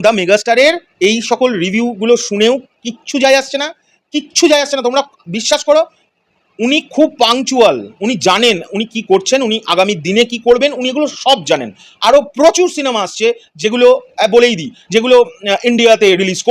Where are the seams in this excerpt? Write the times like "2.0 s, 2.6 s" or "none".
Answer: none

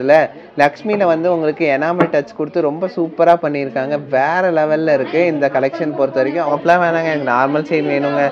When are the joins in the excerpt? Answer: 6.5 s

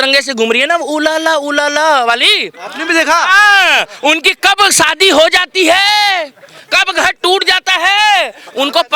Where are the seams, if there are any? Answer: none

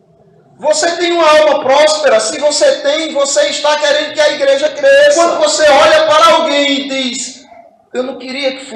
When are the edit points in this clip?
5.1 s

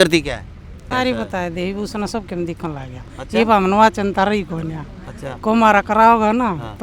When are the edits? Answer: 0.9 s

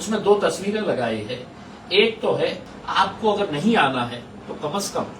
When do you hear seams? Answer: 2.7 s

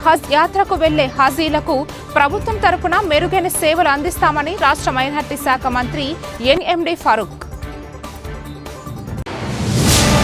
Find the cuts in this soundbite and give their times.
7.3 s, 9.2 s

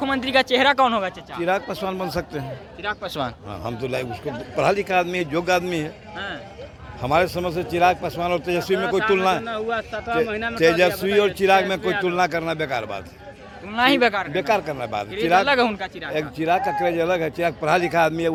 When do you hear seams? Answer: none

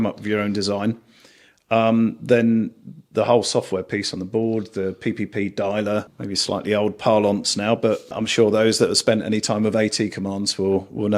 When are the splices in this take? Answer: 6.2 s, 8.2 s

